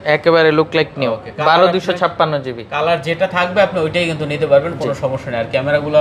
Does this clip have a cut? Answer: no; 0 cuts

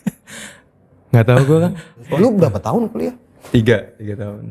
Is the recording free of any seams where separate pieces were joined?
no; 1 cut; at 2.0 s

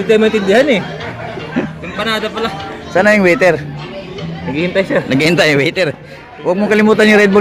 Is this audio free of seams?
yes; 0 cuts

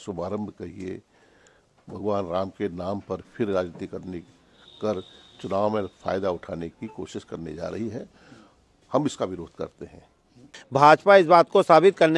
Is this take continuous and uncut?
no; 1 cut; at 10.6 s

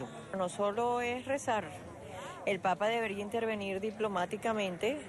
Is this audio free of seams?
yes; 0 cuts

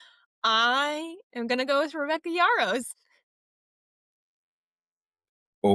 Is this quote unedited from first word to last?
yes; 0 cuts

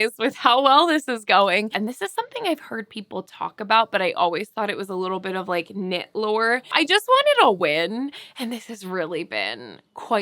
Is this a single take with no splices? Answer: no; 2 cuts; at 1.7 s, 6.7 s

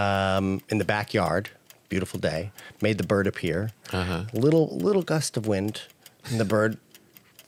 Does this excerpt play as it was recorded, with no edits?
yes; 0 cuts

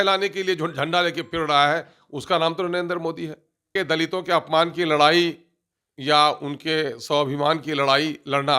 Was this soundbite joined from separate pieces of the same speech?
yes; 1 cut; at 3.8 s

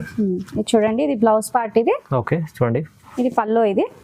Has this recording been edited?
no; 0 cuts

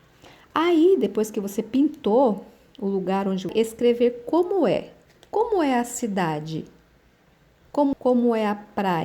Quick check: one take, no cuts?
no; 2 cuts; at 3.5 s, 7.9 s

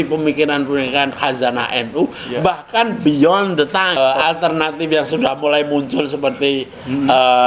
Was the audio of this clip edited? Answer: yes; 1 cut; at 4.0 s

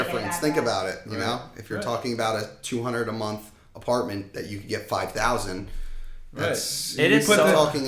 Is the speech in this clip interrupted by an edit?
no; 0 cuts

